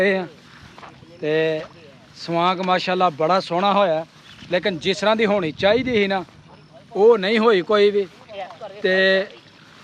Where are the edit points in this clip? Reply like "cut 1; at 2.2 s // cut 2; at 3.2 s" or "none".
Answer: none